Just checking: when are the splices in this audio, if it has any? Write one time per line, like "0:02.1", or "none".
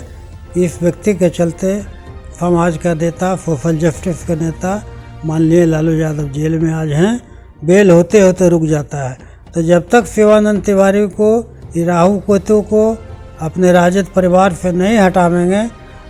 none